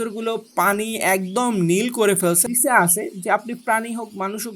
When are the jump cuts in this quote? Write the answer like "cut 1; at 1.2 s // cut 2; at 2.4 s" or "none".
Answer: cut 1; at 2.5 s